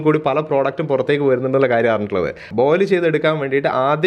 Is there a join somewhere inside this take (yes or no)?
yes